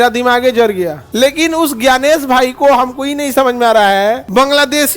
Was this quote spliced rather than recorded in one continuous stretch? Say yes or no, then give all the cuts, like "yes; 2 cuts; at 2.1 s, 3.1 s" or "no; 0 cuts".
yes; 1 cut; at 1.0 s